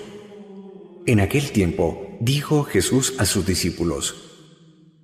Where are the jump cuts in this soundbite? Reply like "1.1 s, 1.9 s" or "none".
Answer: none